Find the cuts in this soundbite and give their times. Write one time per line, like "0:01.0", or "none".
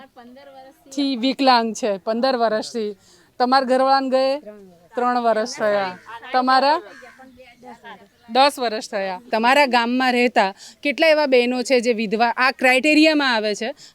0:09.2